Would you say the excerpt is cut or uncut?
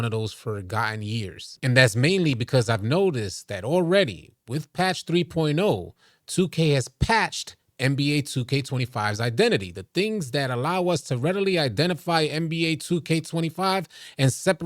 cut